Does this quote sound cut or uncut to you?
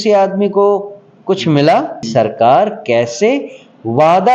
cut